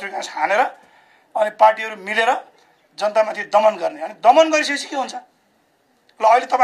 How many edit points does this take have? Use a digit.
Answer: 0